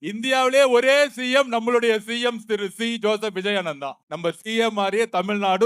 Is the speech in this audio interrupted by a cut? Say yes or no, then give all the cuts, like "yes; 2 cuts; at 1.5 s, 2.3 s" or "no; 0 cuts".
yes; 1 cut; at 4.0 s